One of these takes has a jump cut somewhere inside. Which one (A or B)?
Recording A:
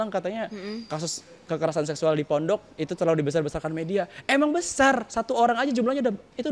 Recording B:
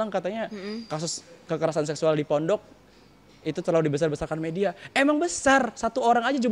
A